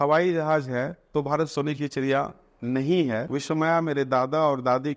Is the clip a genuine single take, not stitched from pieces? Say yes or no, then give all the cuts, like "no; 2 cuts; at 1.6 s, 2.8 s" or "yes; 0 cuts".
no; 1 cut; at 3.2 s